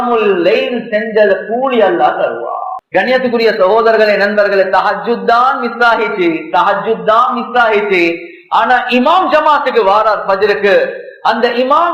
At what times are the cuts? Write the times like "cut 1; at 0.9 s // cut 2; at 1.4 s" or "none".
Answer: cut 1; at 2.7 s